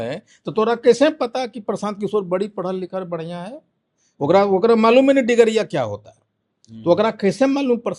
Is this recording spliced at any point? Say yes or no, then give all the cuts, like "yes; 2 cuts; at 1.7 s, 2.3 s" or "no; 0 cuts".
no; 0 cuts